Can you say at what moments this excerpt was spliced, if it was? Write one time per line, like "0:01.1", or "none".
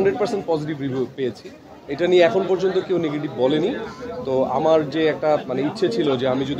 none